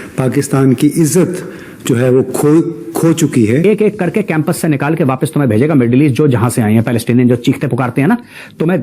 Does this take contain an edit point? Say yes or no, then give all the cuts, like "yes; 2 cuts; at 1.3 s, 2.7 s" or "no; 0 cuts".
yes; 1 cut; at 3.6 s